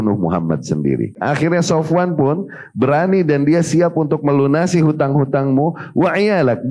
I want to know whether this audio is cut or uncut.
cut